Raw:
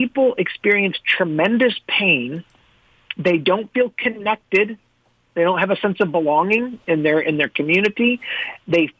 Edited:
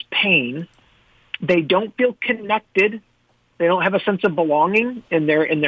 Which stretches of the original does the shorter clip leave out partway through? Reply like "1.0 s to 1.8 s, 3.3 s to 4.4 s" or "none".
none

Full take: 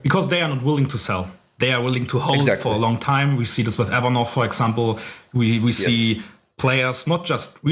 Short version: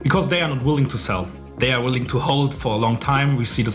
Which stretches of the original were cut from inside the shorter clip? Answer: none

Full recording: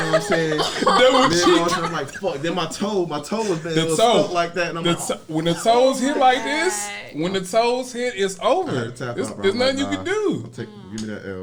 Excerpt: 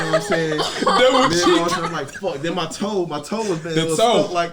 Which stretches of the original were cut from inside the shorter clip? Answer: none

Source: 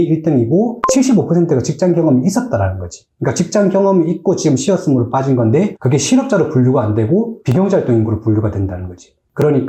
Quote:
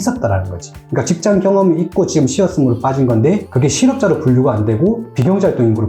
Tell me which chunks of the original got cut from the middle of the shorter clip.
none

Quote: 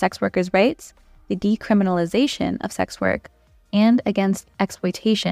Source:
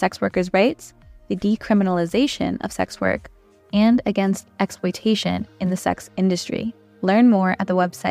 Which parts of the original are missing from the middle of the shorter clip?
none

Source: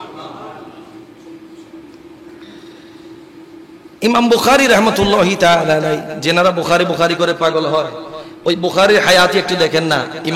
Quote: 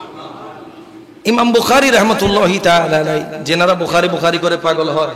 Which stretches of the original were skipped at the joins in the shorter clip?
1.1 s to 3.9 s

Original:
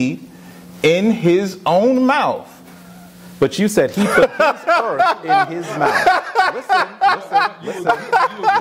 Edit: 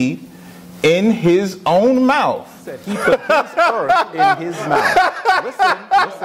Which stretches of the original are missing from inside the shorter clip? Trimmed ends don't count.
2.9 s to 4.0 s

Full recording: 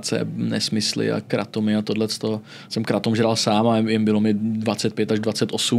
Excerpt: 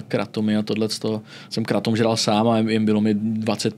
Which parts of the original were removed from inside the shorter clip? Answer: none

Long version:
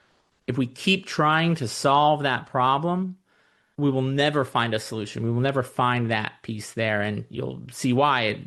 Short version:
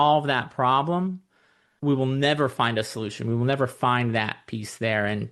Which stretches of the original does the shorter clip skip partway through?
none

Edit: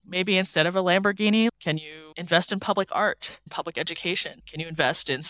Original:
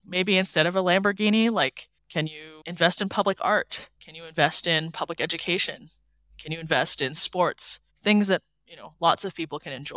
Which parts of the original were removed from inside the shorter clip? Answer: 1.5 s to 2.0 s, 4.0 s to 4.9 s, 5.8 s to 6.3 s

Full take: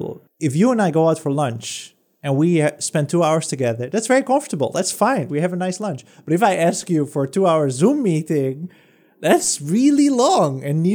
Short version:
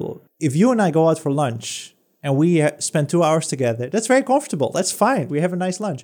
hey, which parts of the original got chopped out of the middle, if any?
none

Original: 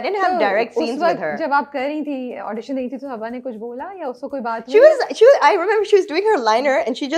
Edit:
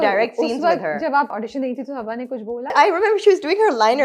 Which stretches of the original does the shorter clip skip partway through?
1.7 s to 2.4 s, 3.9 s to 5.4 s

